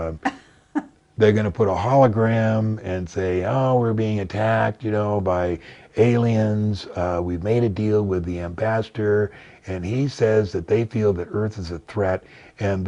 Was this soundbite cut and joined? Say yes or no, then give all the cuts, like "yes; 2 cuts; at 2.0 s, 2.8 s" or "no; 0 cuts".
no; 0 cuts